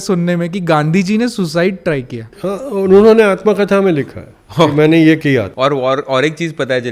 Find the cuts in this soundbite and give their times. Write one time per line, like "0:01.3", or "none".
none